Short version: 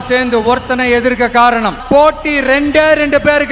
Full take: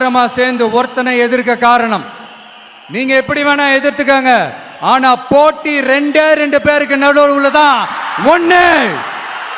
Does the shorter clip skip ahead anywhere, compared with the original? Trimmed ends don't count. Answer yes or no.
yes